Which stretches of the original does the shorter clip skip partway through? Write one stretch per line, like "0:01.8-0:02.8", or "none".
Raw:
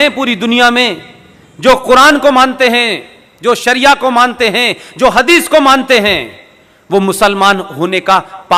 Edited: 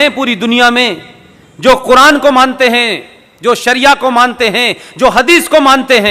none